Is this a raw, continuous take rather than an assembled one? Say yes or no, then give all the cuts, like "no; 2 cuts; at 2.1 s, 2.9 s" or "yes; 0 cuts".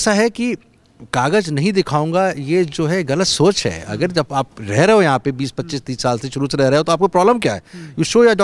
yes; 0 cuts